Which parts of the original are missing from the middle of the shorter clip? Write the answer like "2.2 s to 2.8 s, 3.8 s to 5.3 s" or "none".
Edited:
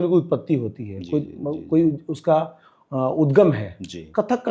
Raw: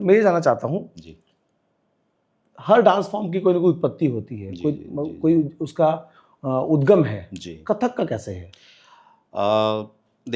none